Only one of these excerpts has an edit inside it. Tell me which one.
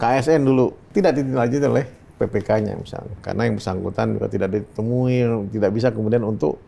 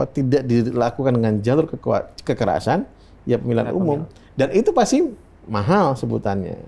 first; 2 cuts; at 0.8 s, 3.1 s

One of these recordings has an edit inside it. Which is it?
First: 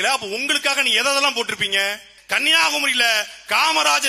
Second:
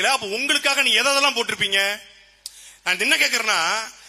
first; 1 cut; at 2.1 s

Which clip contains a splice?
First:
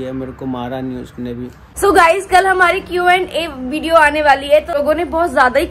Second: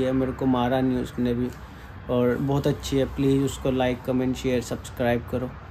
first; 2 cuts; at 1.6 s, 4.7 s

